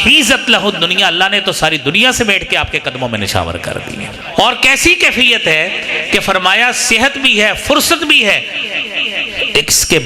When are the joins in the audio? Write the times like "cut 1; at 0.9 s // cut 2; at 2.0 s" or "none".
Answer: cut 1; at 4.2 s